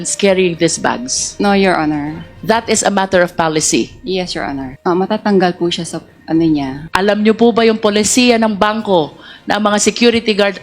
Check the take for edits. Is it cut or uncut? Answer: uncut